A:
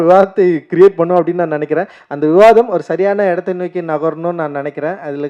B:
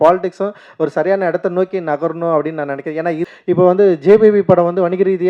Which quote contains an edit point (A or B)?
B